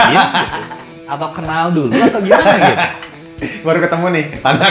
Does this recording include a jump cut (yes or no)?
no